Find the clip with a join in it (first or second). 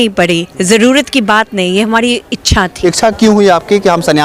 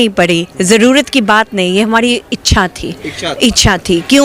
first